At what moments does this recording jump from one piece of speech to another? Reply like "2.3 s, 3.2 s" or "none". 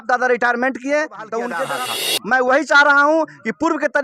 1.7 s